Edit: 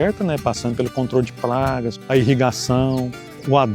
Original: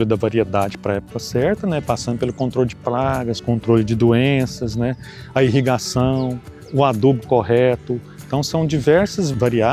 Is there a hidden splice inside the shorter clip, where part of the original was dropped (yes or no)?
yes